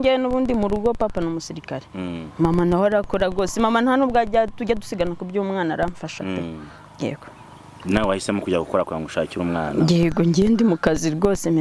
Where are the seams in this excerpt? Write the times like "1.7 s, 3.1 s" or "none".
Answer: none